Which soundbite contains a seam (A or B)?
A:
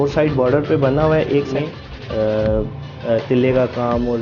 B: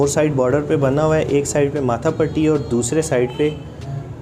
A